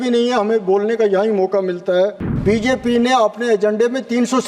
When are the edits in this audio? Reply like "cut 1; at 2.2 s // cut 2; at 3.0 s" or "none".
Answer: cut 1; at 2.3 s